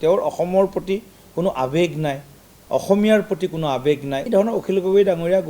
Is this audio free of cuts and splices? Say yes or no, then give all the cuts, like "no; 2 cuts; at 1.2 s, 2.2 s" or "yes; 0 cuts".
no; 1 cut; at 4.3 s